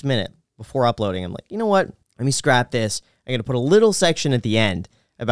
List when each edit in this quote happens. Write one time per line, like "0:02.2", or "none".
0:02.0